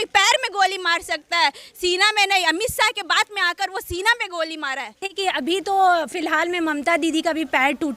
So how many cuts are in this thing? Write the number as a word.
one